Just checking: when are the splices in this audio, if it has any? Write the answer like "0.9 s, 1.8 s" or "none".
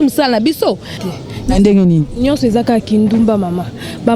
0.9 s